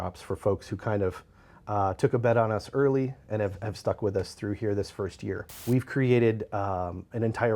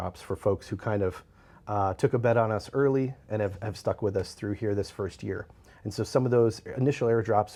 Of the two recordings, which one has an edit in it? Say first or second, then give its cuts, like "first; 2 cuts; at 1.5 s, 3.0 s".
first; 1 cut; at 5.5 s